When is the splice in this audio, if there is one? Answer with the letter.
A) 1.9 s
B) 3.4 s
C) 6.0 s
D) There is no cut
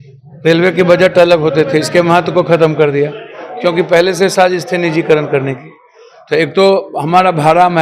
D